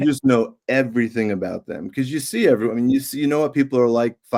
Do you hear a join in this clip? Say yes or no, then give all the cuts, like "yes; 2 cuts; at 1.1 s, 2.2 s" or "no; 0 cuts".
no; 0 cuts